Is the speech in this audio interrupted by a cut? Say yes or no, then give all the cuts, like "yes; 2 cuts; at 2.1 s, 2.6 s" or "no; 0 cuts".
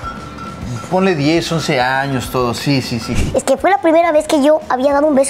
yes; 1 cut; at 3.1 s